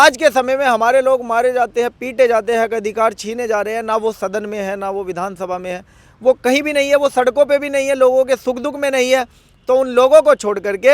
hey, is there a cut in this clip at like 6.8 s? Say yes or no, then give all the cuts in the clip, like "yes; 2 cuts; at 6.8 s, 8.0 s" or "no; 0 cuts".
no; 0 cuts